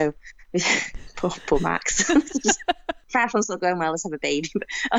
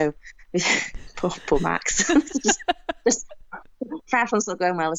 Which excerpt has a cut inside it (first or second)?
first